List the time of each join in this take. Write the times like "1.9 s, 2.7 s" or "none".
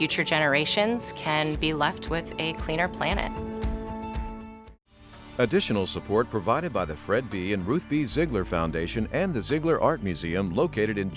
5.2 s

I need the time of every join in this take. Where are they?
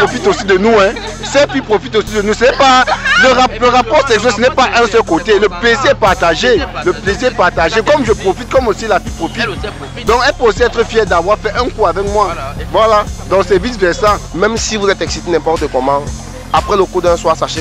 12.5 s, 14.2 s

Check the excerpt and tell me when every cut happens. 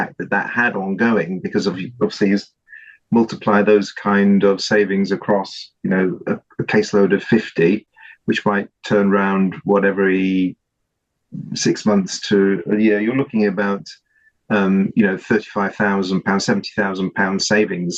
2.7 s

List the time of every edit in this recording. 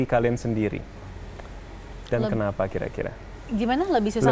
none

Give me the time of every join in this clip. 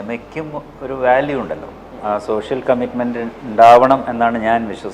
1.9 s

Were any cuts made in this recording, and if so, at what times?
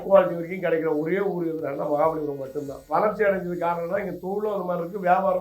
2.8 s

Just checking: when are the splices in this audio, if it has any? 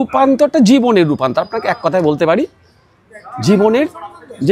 none

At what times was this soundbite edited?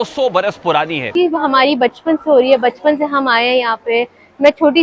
1.0 s

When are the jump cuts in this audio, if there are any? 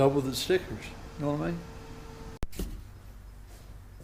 2.4 s

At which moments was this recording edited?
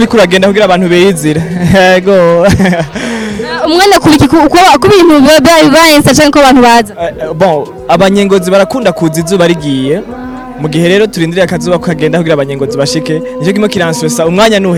none

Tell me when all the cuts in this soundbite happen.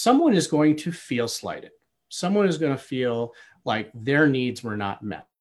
none

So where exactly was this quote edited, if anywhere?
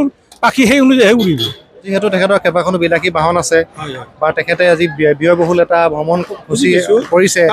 1.9 s

